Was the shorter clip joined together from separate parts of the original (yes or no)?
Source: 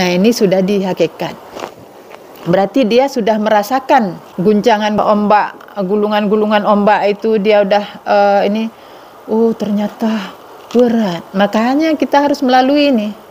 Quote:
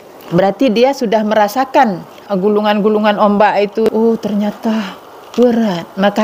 yes